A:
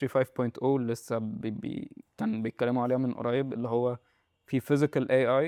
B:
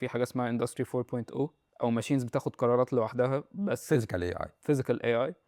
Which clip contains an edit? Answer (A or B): B